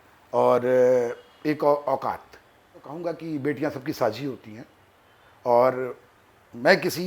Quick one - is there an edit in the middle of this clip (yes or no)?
yes